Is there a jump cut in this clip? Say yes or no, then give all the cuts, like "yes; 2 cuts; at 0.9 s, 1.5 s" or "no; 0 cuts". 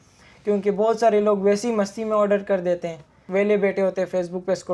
yes; 1 cut; at 3.1 s